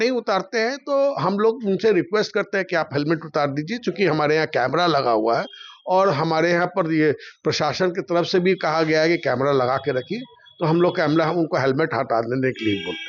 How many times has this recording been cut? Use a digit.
0